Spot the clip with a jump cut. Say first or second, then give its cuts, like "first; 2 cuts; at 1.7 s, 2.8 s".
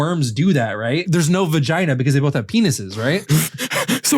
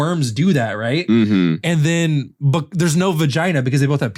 first; 1 cut; at 1.0 s